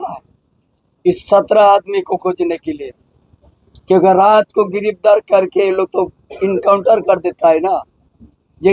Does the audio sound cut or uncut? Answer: uncut